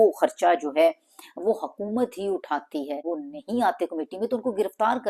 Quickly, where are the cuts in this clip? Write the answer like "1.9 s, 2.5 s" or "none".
2.8 s